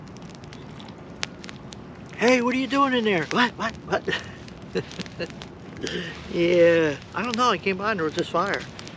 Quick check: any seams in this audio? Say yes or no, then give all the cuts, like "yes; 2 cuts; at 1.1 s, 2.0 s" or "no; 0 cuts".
no; 0 cuts